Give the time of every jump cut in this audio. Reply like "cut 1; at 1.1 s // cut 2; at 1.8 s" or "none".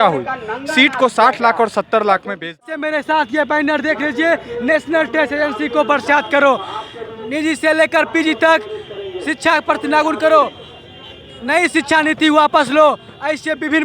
cut 1; at 2.6 s